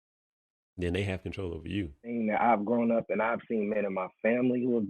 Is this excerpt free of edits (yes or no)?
no